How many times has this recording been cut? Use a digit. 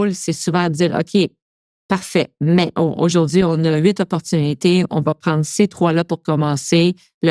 0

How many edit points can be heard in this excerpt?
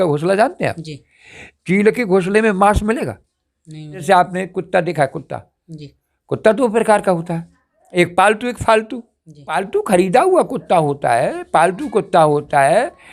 2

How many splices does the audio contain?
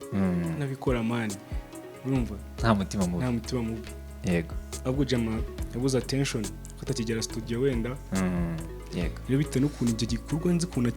1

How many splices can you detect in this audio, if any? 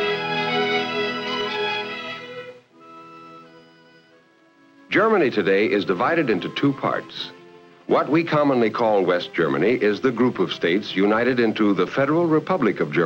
1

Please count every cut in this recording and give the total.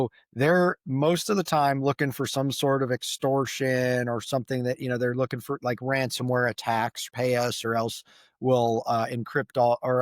1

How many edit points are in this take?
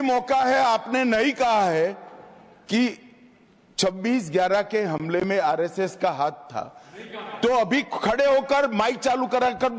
0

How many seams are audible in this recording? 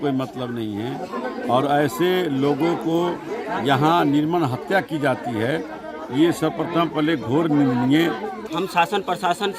1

